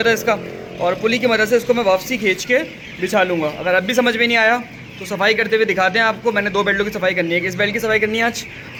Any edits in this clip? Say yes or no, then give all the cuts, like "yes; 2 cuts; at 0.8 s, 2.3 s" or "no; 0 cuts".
no; 0 cuts